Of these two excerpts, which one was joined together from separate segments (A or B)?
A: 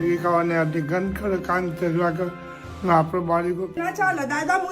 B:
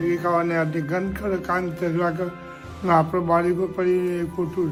A